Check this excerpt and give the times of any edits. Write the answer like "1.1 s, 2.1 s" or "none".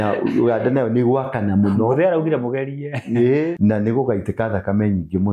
3.5 s